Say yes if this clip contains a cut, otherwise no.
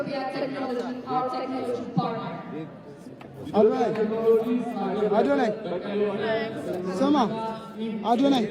no